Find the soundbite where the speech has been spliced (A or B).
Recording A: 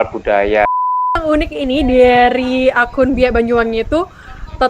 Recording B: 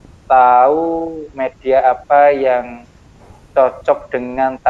A